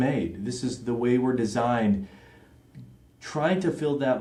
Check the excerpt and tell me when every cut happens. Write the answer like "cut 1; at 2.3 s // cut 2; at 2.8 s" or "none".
none